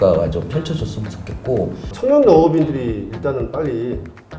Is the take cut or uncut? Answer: cut